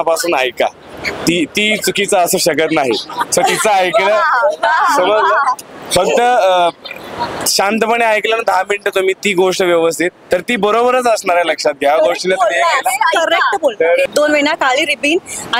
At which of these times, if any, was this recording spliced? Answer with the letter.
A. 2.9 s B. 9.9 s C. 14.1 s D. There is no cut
C